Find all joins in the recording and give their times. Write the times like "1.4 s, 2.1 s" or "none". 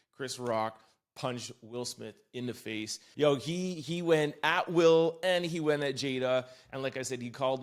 3.0 s